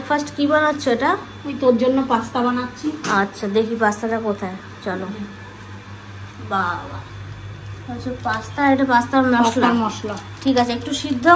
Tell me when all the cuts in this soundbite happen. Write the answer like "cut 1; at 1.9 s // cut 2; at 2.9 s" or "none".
none